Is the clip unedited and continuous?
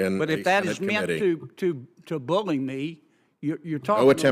yes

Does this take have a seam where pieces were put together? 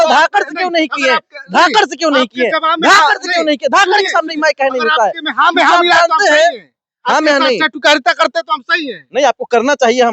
no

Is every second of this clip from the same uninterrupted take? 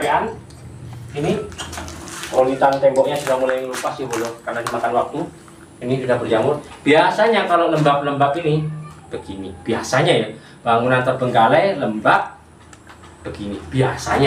yes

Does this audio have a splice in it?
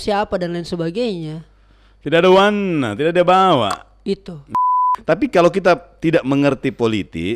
yes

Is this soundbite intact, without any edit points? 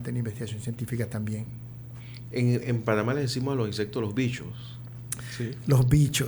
yes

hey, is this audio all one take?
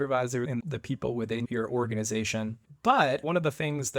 no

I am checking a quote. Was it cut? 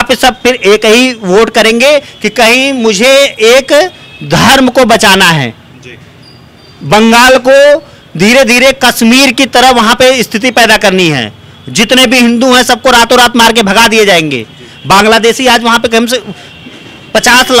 no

